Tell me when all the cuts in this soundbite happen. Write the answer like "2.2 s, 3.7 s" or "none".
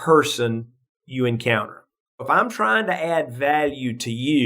2.2 s